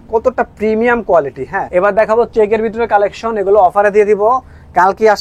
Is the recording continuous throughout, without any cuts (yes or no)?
no